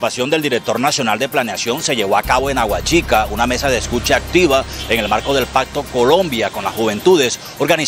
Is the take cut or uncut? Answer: uncut